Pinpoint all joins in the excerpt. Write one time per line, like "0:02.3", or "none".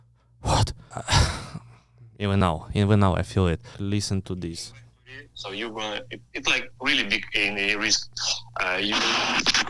0:00.9
0:03.8